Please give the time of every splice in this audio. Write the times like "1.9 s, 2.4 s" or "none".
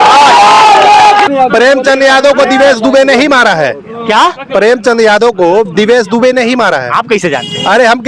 1.3 s